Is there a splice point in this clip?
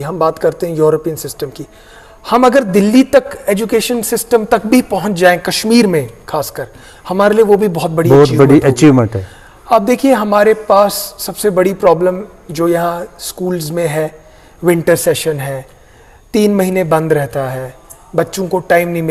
no; 0 cuts

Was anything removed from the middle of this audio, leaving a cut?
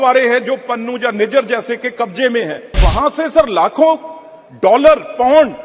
yes; 1 cut; at 2.8 s

